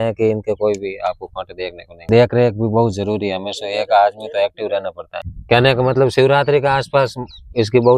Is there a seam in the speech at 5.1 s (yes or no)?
yes